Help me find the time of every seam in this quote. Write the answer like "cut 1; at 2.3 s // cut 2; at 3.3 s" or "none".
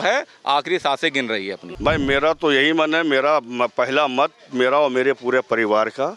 cut 1; at 1.6 s

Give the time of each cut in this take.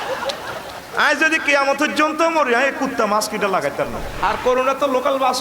cut 1; at 4.1 s

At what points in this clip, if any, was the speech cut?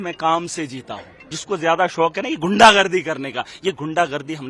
cut 1; at 1.3 s

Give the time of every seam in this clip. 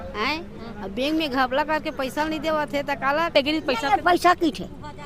cut 1; at 3.3 s

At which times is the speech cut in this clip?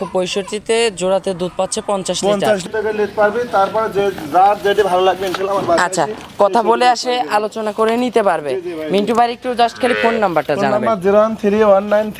cut 1; at 2.6 s // cut 2; at 9.2 s

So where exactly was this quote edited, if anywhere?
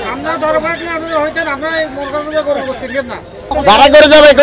cut 1; at 3.5 s

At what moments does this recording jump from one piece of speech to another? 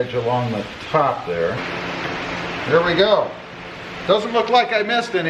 cut 1; at 1.6 s

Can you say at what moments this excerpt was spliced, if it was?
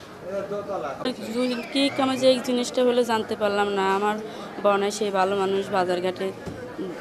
cut 1; at 1.0 s

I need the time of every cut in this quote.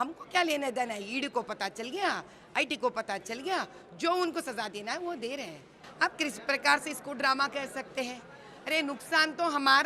cut 1; at 5.8 s

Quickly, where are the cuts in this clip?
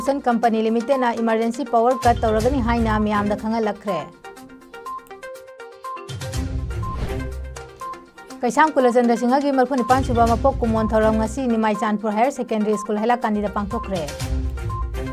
cut 1; at 4.1 s

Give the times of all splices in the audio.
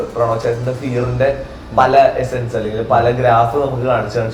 none

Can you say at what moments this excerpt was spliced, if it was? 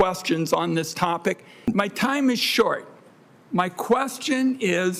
cut 1; at 1.7 s

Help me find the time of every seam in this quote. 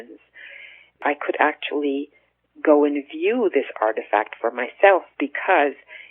cut 1; at 1.0 s

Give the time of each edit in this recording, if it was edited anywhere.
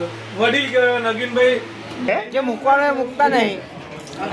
cut 1; at 2.1 s

